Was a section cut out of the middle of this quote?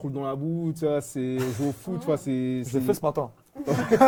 no; 0 cuts

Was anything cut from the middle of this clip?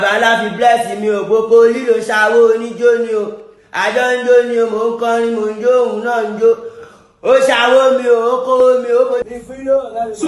yes; 1 cut; at 9.3 s

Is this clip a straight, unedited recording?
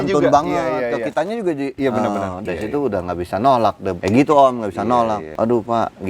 no; 4 cuts; at 1.7 s, 2.4 s, 3.9 s, 5.3 s

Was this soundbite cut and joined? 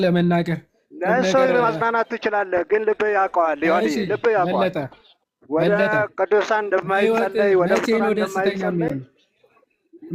no; 0 cuts

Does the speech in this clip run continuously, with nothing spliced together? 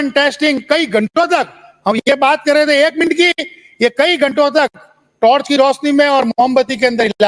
yes; 0 cuts

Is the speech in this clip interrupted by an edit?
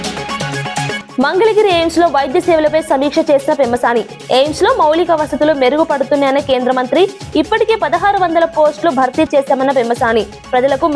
yes; 1 cut; at 1.0 s

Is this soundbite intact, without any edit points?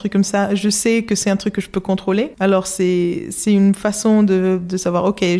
no; 1 cut; at 2.3 s

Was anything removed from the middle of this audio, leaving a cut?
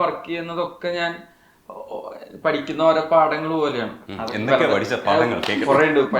no; 0 cuts

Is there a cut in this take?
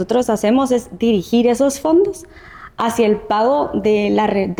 no; 0 cuts

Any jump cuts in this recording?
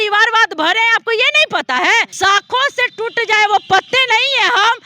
yes; 1 cut; at 2.1 s

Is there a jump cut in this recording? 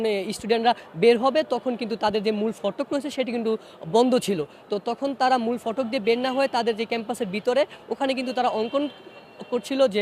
no; 0 cuts

